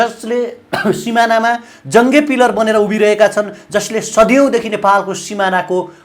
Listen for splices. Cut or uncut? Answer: uncut